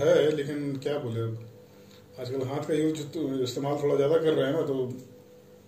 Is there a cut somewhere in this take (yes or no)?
no